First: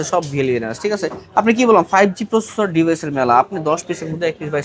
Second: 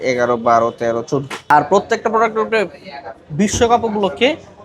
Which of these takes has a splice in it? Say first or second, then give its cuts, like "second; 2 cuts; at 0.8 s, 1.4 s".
second; 1 cut; at 1.3 s